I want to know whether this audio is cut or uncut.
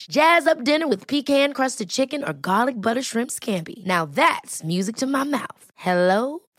uncut